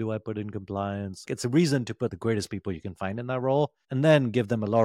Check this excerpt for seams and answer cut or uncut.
cut